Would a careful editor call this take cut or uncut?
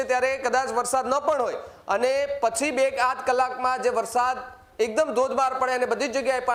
uncut